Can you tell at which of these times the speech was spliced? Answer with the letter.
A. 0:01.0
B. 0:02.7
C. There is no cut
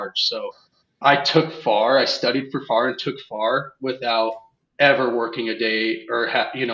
A